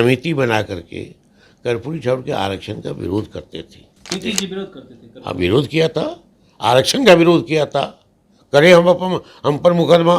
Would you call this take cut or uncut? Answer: cut